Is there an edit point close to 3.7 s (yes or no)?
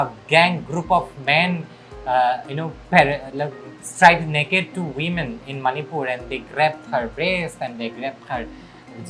no